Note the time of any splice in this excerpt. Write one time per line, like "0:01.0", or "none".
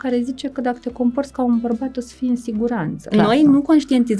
0:03.0